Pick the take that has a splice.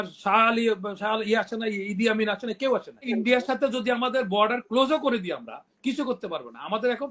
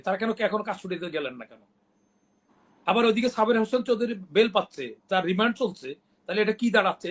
first; 1 cut; at 3.1 s

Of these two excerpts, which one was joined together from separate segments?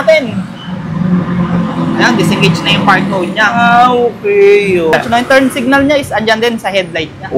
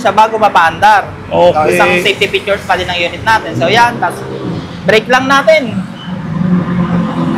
first; 1 cut; at 4.9 s

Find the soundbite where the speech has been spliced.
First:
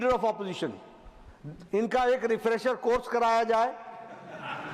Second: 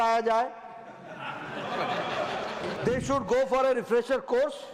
second; 1 cut; at 2.7 s

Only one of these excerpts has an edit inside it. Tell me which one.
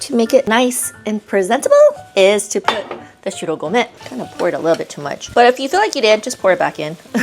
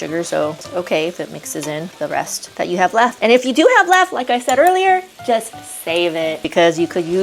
first; 1 cut; at 4.0 s

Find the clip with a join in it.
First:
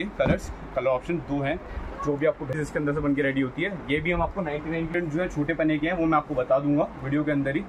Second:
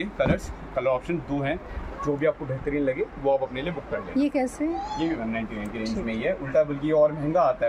first; 2 cuts; at 2.6 s, 4.9 s

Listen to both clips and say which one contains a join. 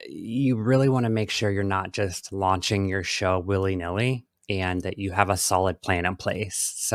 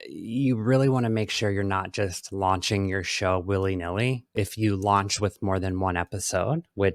second; 1 cut; at 4.4 s

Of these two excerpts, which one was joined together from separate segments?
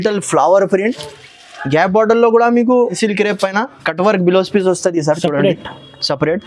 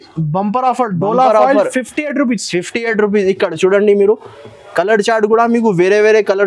first; 1 cut; at 2.9 s

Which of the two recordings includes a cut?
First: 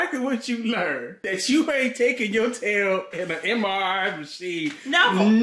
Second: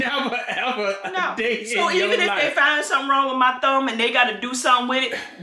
first; 1 cut; at 1.1 s

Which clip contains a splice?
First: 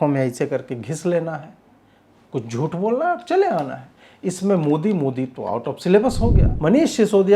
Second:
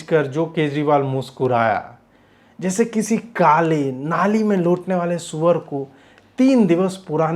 first; 1 cut; at 6.5 s

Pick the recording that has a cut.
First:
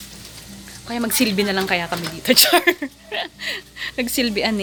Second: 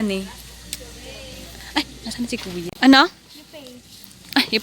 second; 1 cut; at 2.6 s

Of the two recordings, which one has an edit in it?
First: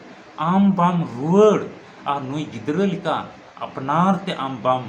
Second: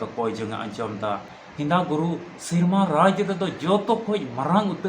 second; 1 cut; at 1.3 s

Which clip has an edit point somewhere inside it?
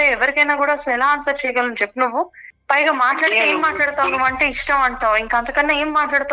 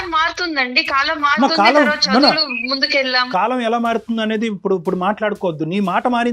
second; 1 cut; at 3.3 s

